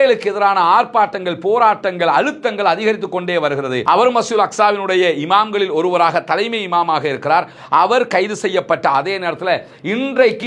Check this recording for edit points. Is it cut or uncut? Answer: cut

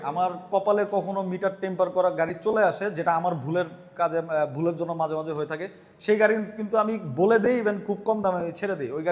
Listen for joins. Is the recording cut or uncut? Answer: uncut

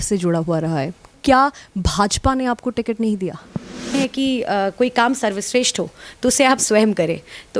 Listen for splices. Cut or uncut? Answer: cut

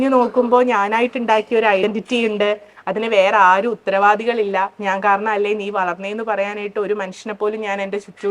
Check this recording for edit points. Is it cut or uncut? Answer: cut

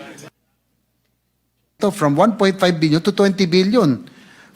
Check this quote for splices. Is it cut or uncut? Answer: cut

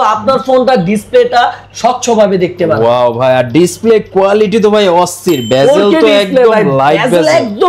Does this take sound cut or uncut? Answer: uncut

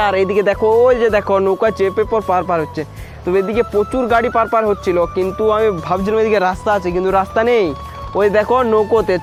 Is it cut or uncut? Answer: uncut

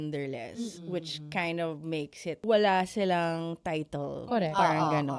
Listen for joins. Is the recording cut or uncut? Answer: cut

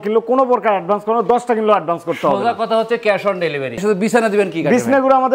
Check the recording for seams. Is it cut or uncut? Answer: cut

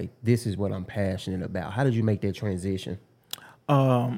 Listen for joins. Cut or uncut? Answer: uncut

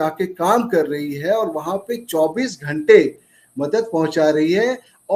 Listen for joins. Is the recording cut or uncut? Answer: uncut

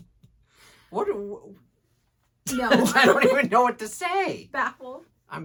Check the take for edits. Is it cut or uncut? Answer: uncut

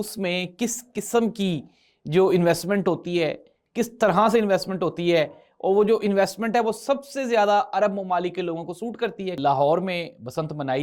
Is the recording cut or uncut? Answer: cut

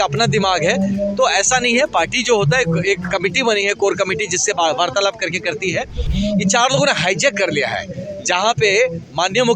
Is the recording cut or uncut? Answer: cut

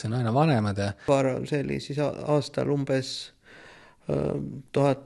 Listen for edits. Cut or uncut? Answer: cut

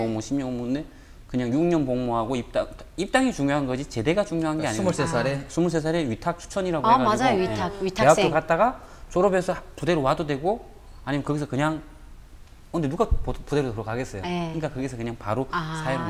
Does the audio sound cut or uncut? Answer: uncut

